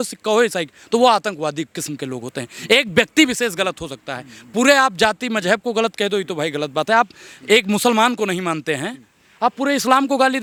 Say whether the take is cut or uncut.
uncut